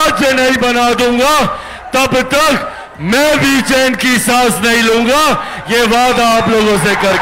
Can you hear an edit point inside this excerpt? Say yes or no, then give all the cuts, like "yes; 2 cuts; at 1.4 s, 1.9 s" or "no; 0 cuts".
no; 0 cuts